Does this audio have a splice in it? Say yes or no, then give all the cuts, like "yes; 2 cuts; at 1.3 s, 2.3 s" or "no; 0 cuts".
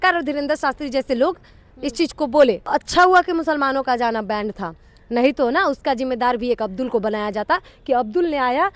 yes; 1 cut; at 2.7 s